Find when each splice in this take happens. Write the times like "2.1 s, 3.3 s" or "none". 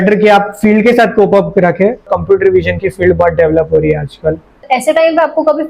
2.1 s, 4.6 s